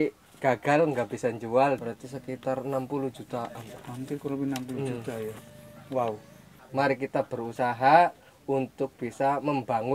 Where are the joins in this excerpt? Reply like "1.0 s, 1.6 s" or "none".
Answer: 1.8 s, 6.6 s